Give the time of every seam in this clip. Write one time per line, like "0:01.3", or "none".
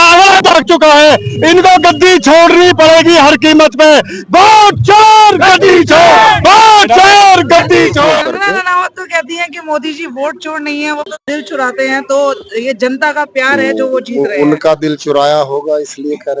0:08.2